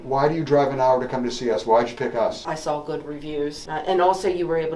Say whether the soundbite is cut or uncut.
cut